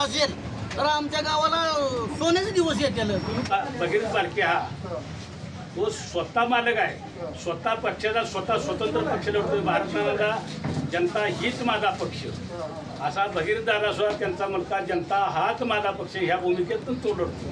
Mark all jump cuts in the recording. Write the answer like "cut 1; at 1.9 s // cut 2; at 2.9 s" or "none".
cut 1; at 3.5 s